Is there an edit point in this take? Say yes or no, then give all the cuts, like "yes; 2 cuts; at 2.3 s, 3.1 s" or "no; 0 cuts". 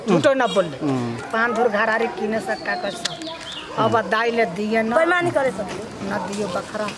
no; 0 cuts